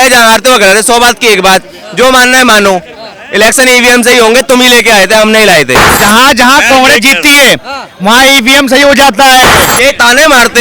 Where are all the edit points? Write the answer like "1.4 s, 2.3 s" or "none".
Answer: 5.9 s, 9.6 s